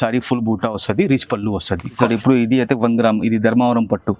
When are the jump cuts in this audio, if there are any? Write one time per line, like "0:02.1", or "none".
0:02.0

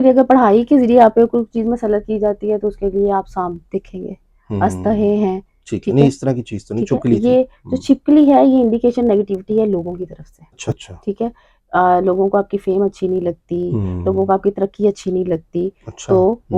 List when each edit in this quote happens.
0:10.6

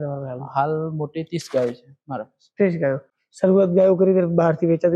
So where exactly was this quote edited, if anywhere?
none

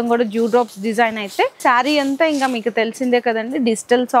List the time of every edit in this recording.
0:01.6

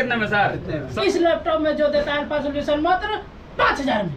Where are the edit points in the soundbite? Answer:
0:01.0

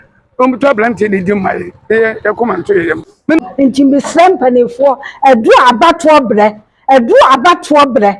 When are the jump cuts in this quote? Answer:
0:03.4

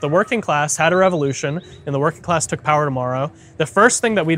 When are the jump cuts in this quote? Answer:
none

